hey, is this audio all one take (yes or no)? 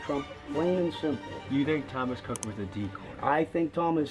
no